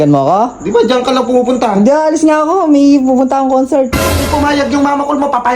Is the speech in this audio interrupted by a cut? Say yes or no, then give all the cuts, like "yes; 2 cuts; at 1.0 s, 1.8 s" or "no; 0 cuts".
yes; 1 cut; at 4.0 s